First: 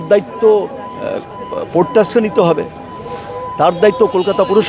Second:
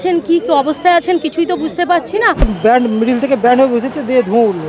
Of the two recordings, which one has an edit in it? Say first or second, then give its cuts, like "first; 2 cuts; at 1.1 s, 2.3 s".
second; 1 cut; at 2.5 s